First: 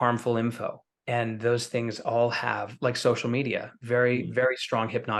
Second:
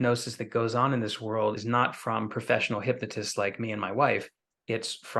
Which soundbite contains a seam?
second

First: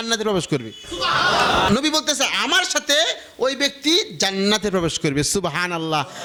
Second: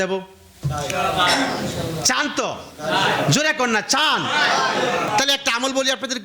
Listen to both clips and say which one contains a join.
second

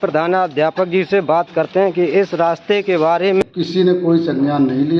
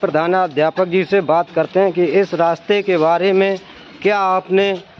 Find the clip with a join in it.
first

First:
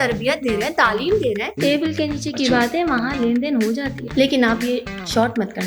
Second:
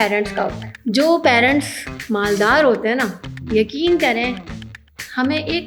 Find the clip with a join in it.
first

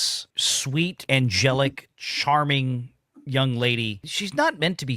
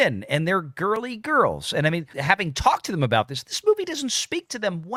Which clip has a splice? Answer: first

